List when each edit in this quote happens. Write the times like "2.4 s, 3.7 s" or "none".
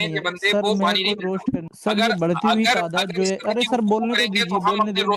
1.7 s